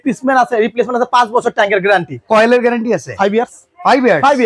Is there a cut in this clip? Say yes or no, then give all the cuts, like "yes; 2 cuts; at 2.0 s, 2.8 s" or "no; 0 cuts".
no; 0 cuts